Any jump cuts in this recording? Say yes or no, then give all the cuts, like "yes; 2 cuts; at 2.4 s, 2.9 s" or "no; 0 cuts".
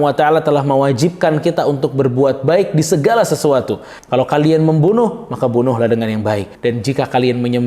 yes; 2 cuts; at 3.9 s, 6.5 s